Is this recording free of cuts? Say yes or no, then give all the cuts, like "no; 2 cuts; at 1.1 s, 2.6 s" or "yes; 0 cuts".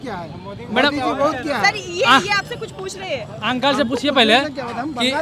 yes; 0 cuts